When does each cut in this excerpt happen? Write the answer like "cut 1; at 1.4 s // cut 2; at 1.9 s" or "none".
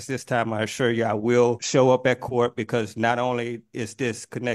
cut 1; at 1.6 s